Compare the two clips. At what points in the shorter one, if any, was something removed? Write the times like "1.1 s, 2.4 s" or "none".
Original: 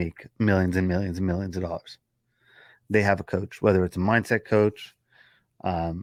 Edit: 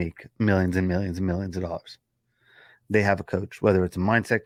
none